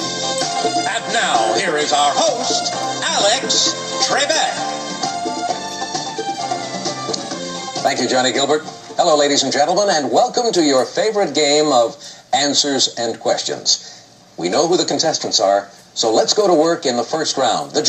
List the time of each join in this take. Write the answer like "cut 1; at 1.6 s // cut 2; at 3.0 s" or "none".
cut 1; at 16.5 s